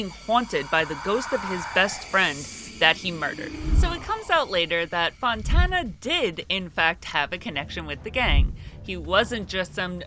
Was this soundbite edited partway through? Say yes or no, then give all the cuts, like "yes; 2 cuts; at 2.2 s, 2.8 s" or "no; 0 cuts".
yes; 1 cut; at 3.8 s